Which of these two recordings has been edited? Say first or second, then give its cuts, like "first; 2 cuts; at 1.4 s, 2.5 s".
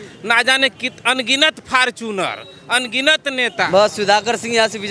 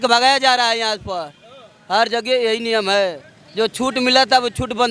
first; 1 cut; at 3.7 s